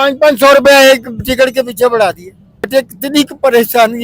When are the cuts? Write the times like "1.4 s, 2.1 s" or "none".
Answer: 2.7 s